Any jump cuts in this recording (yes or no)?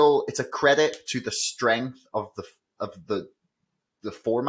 no